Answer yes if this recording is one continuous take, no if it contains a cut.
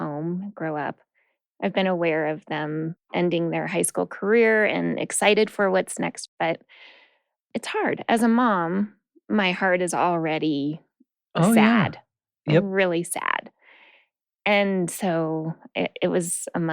no